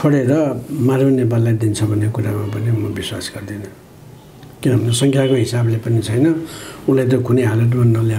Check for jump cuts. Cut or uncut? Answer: uncut